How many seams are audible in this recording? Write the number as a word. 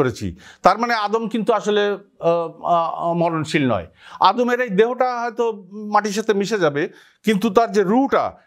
zero